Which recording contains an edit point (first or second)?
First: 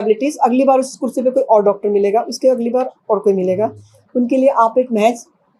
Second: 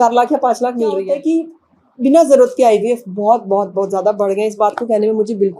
second